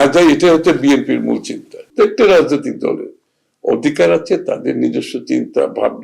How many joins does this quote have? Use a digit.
1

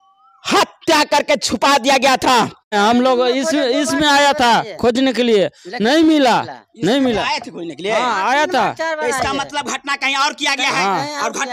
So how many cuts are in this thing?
1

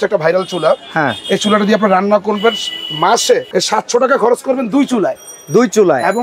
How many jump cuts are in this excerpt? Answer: 1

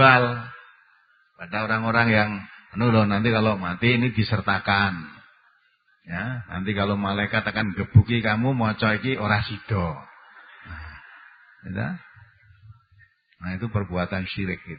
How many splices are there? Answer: 0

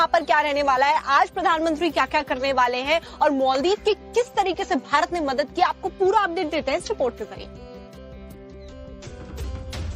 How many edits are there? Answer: 1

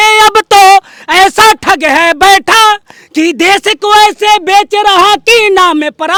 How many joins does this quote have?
0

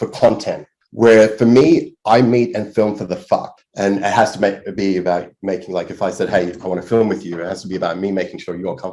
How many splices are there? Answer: 1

